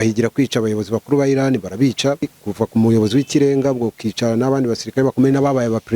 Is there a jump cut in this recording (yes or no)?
yes